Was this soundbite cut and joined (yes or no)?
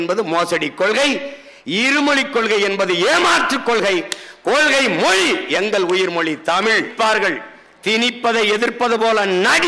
yes